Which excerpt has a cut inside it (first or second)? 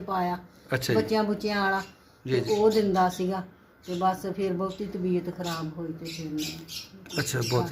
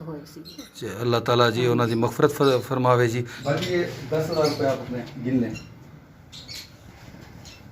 second